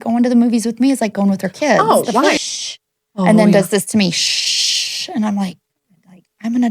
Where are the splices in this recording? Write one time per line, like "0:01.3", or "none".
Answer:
0:02.4